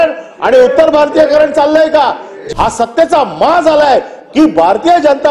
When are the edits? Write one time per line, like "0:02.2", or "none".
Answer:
0:02.3